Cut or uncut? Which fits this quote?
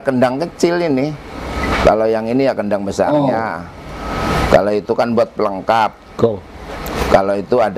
uncut